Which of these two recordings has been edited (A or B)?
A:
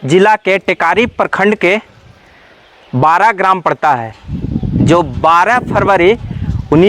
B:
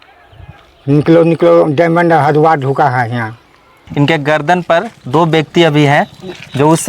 B